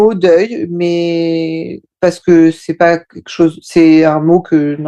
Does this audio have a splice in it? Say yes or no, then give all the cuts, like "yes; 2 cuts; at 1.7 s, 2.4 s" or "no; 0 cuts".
no; 0 cuts